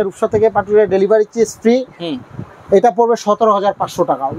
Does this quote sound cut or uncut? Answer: uncut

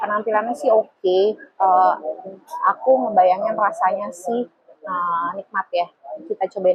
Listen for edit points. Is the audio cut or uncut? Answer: uncut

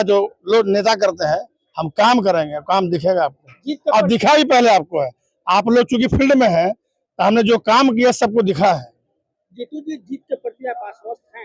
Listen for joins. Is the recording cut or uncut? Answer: uncut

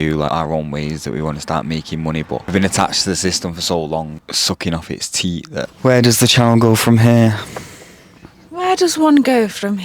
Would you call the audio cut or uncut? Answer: cut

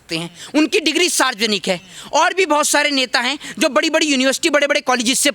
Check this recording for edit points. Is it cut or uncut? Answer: uncut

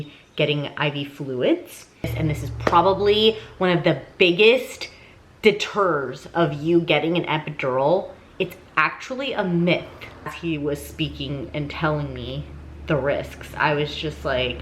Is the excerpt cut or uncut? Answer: cut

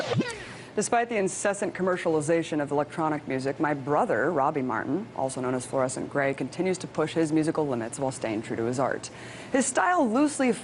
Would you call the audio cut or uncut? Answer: uncut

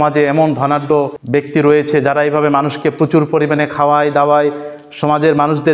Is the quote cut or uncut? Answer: cut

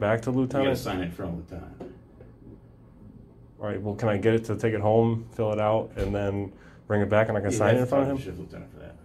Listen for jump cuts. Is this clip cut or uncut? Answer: uncut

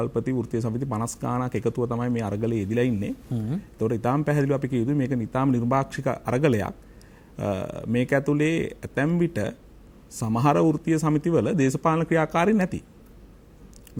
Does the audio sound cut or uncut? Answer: uncut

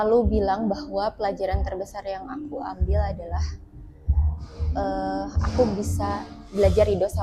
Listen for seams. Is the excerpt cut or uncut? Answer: uncut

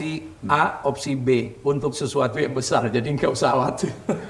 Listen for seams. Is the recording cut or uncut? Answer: uncut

